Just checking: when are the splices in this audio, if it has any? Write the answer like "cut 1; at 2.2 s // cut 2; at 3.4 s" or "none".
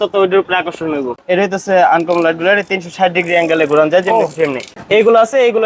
cut 1; at 1.1 s // cut 2; at 4.7 s